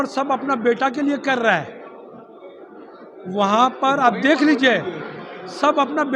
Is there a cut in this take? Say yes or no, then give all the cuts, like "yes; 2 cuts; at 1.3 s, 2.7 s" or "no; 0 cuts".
no; 0 cuts